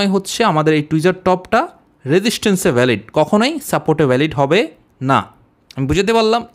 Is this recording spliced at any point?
no; 0 cuts

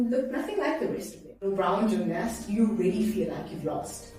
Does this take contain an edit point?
yes; 1 cut; at 1.5 s

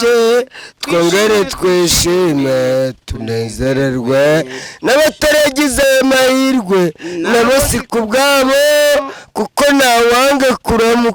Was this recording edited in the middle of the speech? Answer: no; 0 cuts

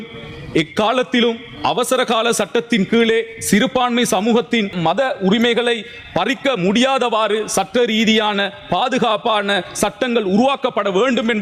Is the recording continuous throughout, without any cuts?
yes; 0 cuts

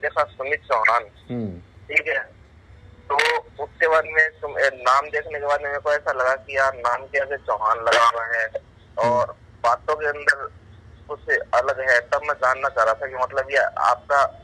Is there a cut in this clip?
no; 0 cuts

